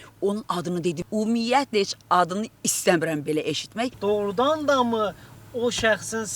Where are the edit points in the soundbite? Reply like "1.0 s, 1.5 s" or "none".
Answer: 1.0 s, 3.9 s